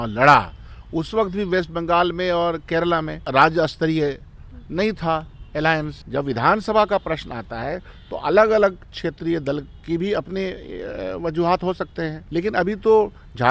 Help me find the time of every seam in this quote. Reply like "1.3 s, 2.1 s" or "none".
3.2 s, 6.0 s, 12.2 s

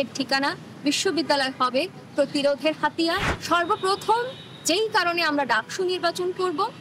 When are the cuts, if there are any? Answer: 3.3 s

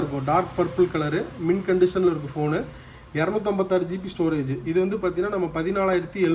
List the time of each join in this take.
none

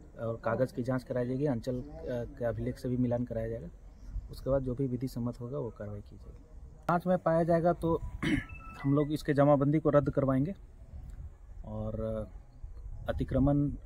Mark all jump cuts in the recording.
6.9 s

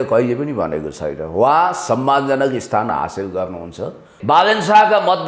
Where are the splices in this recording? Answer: 4.1 s

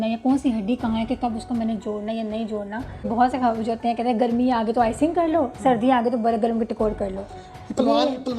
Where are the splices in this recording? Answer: 3.0 s

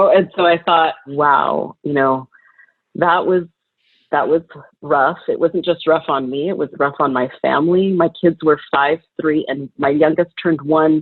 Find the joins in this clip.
1.1 s

